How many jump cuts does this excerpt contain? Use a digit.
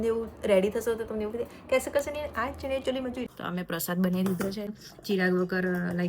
2